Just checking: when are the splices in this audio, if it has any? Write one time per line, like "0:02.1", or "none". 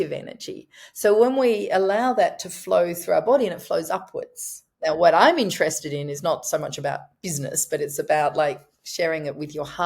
0:04.6